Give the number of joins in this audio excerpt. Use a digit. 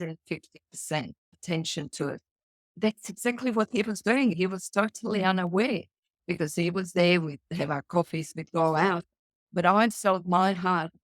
3